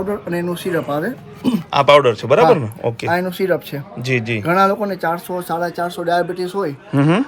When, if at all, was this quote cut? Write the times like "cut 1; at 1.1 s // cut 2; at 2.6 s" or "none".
none